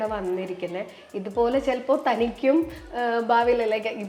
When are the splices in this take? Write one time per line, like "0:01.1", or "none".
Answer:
none